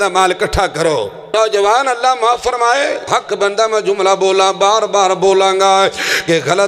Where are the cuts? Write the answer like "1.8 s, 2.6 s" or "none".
1.3 s, 3.1 s